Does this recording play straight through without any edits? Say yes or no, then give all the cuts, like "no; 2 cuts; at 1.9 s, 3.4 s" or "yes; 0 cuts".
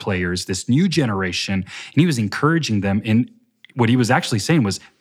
yes; 0 cuts